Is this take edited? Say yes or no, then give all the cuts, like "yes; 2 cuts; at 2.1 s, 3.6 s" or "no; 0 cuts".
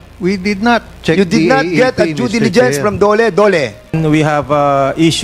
yes; 1 cut; at 3.9 s